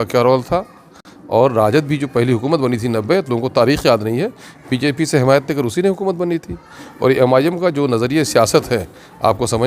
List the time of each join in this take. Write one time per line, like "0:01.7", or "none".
none

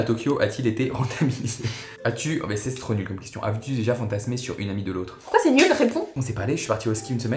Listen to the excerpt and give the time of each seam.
0:02.0
0:06.2

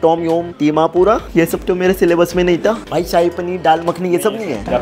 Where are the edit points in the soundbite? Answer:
none

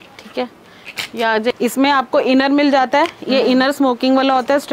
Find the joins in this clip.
0:01.5

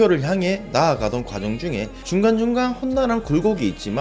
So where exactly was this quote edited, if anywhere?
0:02.0

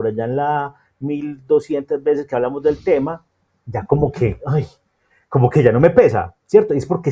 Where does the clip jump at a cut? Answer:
none

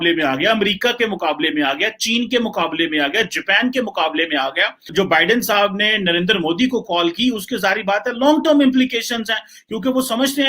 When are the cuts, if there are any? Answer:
0:04.8

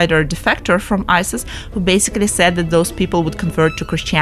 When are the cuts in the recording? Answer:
none

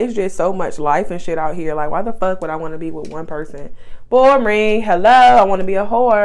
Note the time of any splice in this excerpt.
none

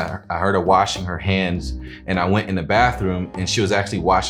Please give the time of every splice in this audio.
none

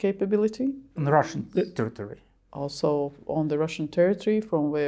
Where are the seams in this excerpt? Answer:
0:00.9

